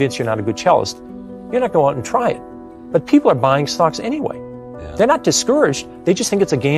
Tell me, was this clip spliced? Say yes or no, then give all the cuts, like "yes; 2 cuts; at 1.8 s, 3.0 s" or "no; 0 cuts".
no; 0 cuts